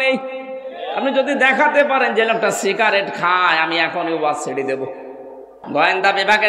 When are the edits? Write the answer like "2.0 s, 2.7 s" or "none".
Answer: 5.5 s